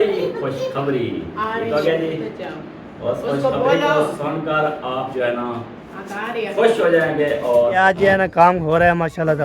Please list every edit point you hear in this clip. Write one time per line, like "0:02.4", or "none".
0:07.7